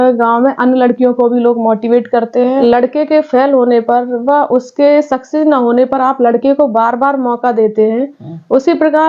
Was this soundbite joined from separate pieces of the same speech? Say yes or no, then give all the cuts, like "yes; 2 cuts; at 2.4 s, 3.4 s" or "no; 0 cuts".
yes; 1 cut; at 2.6 s